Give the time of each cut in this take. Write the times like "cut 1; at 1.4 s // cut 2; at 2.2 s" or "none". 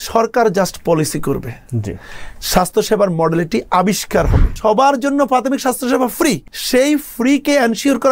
cut 1; at 4.5 s // cut 2; at 6.5 s